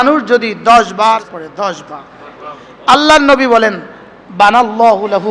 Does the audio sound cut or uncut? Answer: cut